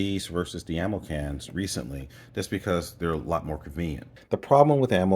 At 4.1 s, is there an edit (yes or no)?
yes